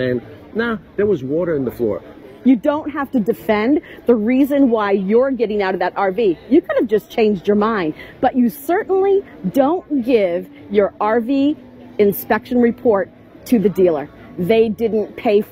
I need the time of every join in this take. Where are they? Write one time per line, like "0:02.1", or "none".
0:02.1